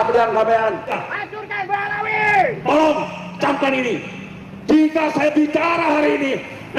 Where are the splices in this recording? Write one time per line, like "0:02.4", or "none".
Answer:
0:01.0